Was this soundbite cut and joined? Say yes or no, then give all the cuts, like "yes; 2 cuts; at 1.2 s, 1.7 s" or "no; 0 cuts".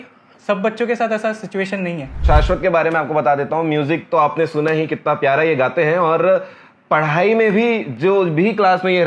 yes; 1 cut; at 2.2 s